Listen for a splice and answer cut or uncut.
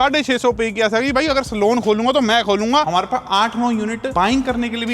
cut